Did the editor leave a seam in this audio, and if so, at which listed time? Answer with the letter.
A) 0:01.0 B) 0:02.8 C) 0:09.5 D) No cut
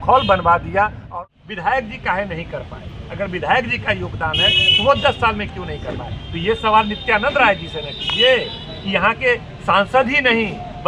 A